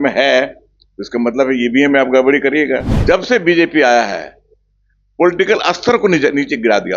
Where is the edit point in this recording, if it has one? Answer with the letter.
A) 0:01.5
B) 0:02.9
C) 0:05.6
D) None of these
B